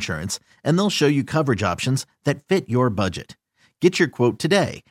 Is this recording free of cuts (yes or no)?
yes